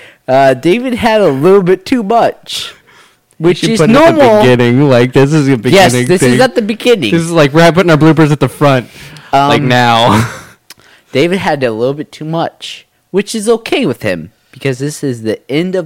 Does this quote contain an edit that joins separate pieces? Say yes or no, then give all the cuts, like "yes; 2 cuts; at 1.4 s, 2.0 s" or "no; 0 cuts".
no; 0 cuts